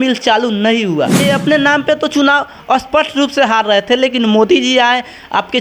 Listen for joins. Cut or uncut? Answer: cut